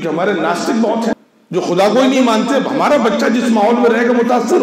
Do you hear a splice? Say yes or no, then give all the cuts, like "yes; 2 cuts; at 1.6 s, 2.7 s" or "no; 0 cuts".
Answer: yes; 1 cut; at 1.1 s